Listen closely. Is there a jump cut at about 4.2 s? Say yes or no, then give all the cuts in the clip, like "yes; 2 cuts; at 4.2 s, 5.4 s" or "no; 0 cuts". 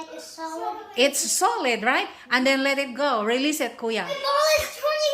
yes; 1 cut; at 4.2 s